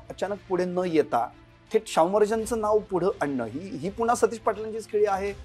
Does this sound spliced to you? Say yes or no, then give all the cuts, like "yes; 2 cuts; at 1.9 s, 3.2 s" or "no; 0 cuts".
no; 0 cuts